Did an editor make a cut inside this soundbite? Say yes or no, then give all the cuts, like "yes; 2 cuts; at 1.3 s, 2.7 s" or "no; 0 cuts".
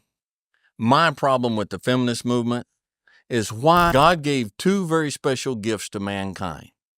yes; 1 cut; at 3.9 s